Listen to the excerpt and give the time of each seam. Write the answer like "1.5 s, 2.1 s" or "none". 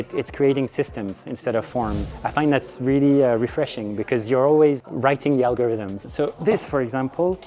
6.0 s